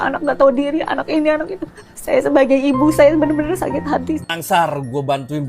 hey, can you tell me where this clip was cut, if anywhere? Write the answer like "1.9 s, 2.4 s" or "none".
4.4 s